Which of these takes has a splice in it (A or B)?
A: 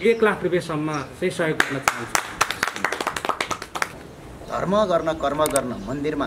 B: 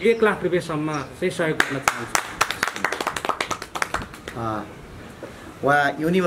A